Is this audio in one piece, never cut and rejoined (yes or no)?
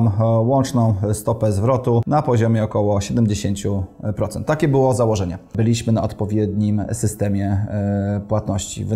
no